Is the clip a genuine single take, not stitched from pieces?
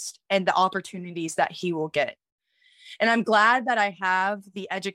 yes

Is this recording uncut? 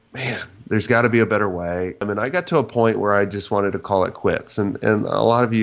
no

